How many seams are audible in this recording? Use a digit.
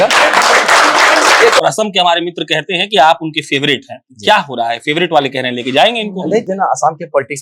2